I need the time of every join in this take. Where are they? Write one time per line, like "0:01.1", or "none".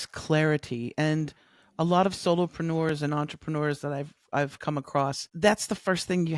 none